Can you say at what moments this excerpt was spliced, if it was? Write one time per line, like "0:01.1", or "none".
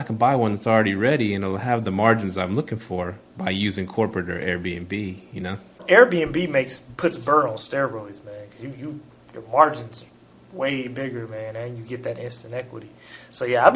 0:05.8